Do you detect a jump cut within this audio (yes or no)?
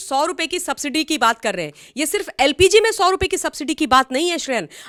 no